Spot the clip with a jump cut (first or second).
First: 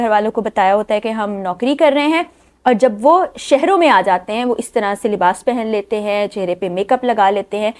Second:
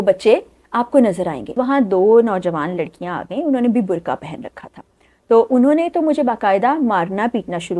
second